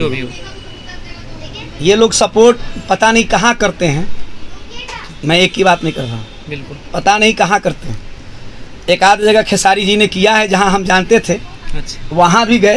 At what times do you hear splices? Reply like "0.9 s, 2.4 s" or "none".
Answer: none